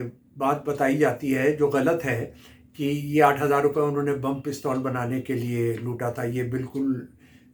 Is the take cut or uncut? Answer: uncut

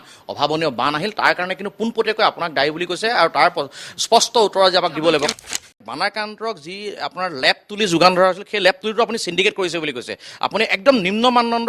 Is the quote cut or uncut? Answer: cut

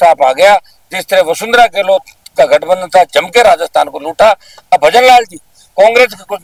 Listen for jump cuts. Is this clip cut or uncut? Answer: uncut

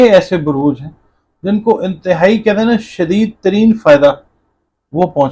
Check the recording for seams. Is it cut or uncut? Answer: uncut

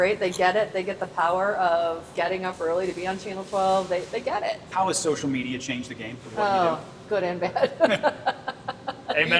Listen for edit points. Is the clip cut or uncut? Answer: cut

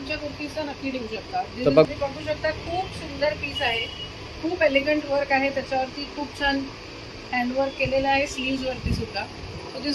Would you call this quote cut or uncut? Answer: cut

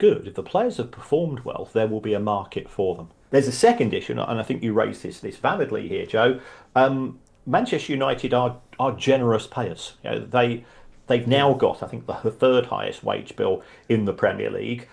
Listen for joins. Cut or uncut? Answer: cut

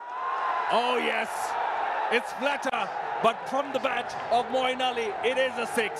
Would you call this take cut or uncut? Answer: uncut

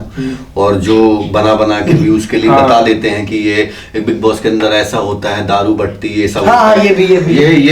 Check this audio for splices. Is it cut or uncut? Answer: uncut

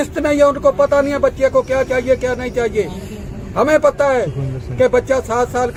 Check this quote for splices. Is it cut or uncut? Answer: uncut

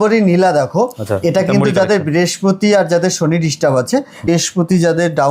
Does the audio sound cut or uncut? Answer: cut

